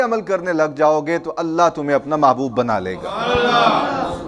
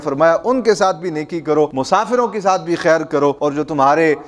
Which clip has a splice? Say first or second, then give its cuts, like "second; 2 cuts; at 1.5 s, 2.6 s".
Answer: second; 2 cuts; at 1.8 s, 3.4 s